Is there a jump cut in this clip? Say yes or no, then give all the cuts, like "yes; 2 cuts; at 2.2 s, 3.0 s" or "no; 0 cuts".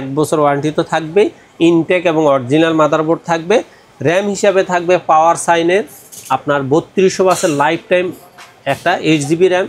no; 0 cuts